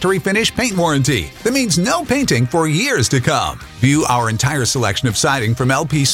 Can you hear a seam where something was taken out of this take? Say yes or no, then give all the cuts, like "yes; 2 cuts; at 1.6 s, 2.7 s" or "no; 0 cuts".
no; 0 cuts